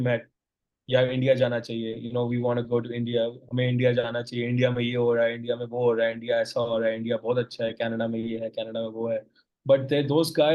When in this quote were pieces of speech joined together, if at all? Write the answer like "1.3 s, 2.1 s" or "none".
none